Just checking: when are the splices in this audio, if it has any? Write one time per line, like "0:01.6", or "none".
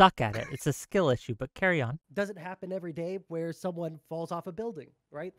0:02.0